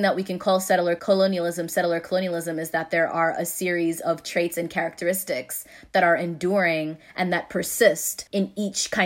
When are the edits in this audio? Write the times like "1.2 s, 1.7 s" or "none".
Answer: 1.0 s, 8.1 s